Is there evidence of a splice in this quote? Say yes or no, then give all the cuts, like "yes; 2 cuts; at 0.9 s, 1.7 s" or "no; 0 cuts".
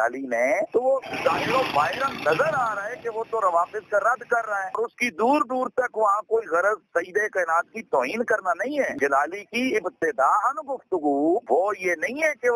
yes; 3 cuts; at 1.1 s, 4.7 s, 8.9 s